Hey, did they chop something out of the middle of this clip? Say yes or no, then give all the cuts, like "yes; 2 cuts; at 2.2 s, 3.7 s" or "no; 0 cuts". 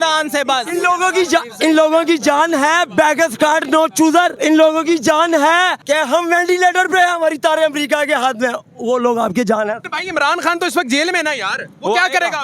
yes; 3 cuts; at 4.3 s, 5.8 s, 9.9 s